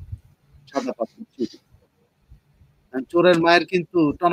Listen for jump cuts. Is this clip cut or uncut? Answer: uncut